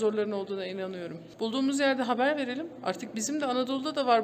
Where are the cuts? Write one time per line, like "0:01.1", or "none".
0:01.2